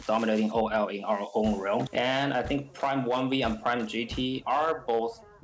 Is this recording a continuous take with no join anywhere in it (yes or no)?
no